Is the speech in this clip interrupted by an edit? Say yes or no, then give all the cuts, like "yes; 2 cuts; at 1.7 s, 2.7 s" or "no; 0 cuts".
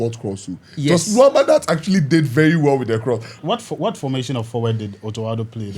yes; 1 cut; at 3.4 s